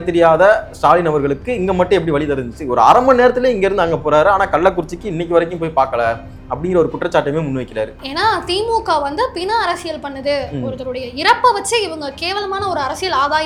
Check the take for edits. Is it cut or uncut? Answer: uncut